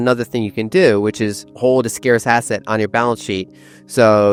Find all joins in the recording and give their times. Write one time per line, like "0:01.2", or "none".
none